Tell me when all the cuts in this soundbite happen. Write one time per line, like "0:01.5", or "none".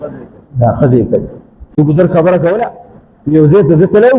0:01.8